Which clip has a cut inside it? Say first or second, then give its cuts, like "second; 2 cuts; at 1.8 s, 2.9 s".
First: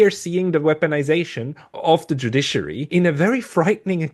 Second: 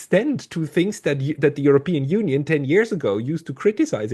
first; 2 cuts; at 1.6 s, 2.9 s